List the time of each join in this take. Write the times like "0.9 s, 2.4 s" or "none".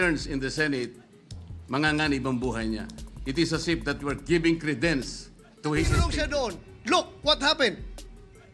6.1 s